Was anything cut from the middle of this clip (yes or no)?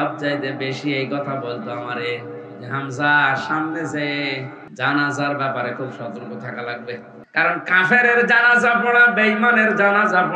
yes